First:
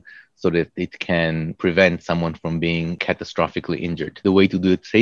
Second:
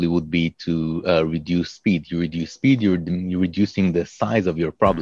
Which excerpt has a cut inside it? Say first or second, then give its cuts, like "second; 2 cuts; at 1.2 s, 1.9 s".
first; 3 cuts; at 1.5 s, 3.0 s, 4.2 s